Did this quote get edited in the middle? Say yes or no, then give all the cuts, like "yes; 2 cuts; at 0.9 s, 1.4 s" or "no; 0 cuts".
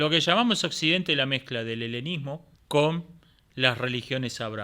yes; 1 cut; at 2.5 s